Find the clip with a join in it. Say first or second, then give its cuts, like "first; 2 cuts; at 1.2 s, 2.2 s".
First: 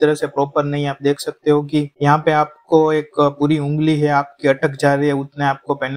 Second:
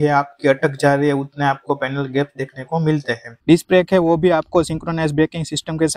second; 1 cut; at 3.4 s